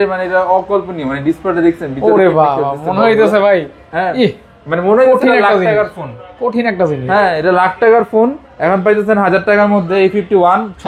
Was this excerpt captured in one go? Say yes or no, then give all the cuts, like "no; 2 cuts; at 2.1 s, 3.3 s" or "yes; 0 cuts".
yes; 0 cuts